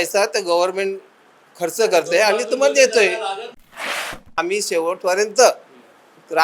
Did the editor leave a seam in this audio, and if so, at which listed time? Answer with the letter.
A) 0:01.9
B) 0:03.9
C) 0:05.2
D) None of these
B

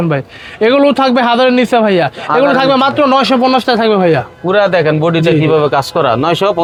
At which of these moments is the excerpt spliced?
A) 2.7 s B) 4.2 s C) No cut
C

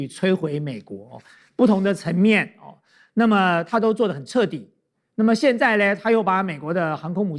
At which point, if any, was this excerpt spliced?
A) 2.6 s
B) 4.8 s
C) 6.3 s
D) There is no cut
D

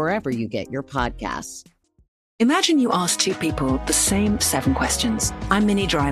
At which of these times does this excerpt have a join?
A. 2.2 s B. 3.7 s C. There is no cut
A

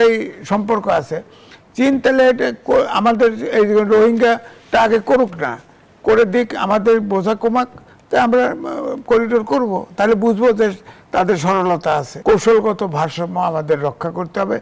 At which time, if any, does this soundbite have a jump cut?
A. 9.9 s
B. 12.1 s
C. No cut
B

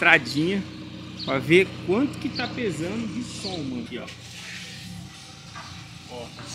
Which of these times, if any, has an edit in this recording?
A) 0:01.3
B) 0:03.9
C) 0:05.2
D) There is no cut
B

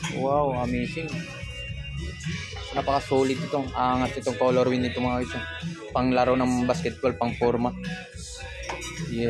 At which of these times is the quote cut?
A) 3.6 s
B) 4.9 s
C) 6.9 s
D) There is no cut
D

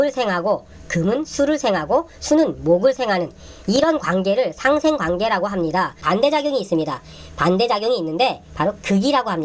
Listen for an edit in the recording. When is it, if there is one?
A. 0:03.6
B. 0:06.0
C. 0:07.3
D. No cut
B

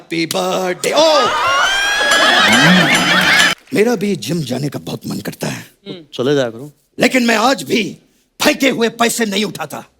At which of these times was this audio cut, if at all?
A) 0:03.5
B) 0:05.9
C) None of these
A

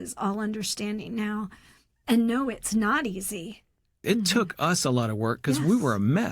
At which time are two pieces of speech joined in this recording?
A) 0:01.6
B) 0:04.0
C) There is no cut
B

